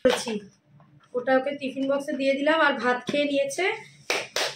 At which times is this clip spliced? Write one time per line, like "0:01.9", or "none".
none

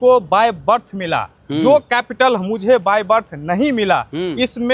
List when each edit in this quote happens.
none

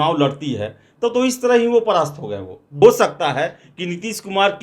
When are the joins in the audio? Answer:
0:02.8

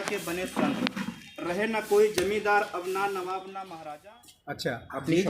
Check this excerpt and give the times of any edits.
0:03.7

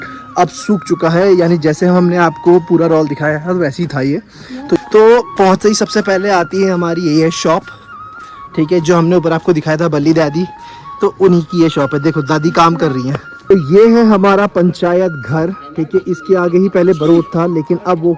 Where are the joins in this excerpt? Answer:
0:04.8
0:13.5

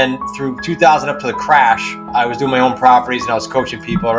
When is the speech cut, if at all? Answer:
none

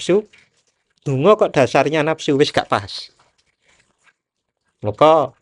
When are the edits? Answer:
none

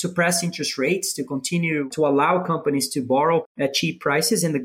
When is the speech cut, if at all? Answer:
0:01.9
0:03.5

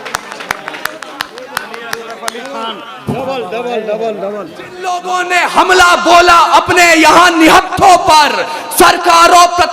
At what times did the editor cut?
0:04.9

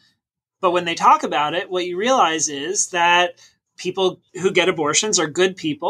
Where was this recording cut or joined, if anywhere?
0:03.5

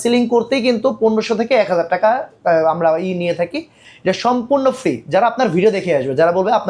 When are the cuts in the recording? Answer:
none

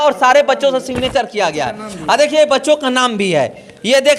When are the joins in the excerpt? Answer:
none

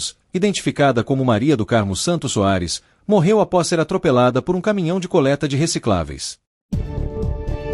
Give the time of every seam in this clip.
0:06.7

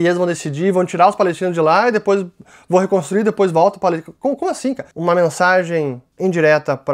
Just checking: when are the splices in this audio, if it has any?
0:04.9
0:06.0

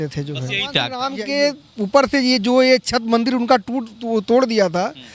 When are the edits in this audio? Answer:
0:01.0

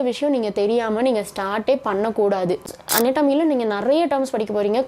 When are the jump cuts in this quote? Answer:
0:02.7

